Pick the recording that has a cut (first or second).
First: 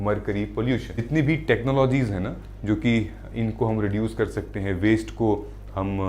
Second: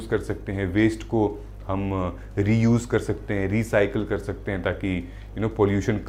first